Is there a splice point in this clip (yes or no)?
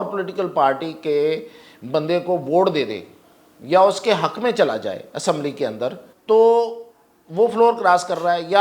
yes